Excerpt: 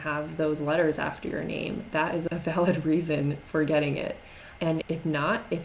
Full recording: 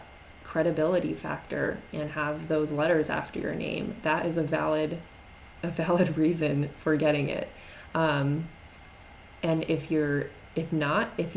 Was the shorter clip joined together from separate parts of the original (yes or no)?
yes